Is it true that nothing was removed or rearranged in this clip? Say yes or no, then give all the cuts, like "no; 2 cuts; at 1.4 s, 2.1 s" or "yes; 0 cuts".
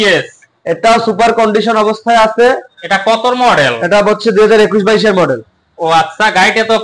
yes; 0 cuts